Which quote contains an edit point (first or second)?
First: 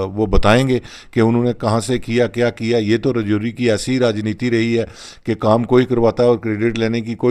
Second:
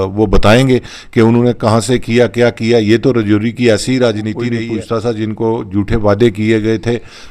second